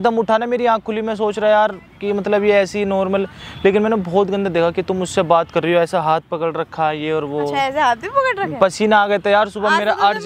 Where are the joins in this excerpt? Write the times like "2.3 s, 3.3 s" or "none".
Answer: none